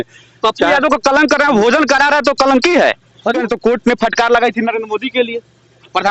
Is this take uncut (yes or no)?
no